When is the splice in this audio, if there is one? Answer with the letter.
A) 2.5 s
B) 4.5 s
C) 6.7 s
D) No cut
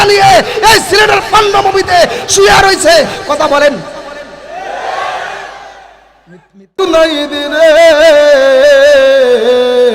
C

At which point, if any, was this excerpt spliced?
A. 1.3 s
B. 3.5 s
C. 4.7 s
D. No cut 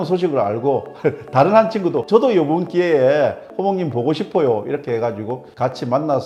D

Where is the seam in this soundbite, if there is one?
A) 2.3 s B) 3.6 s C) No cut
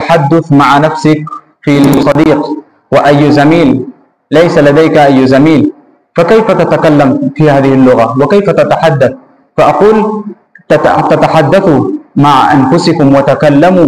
A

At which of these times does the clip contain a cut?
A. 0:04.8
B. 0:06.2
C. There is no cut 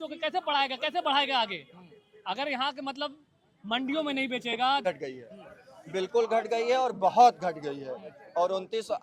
A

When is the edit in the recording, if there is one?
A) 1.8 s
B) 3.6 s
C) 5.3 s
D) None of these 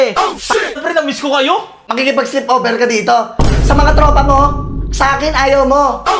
A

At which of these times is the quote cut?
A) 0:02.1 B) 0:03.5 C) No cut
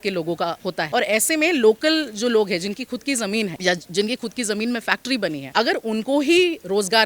C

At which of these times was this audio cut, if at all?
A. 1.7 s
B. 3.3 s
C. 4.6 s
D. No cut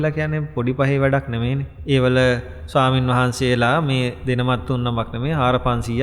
A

